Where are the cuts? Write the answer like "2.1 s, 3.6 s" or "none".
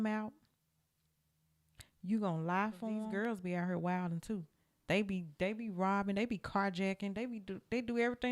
3.0 s